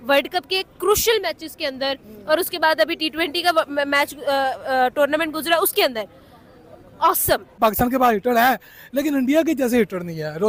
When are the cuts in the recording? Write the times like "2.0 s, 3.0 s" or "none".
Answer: none